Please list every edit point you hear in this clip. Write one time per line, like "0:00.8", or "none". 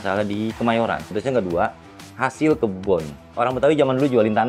0:01.1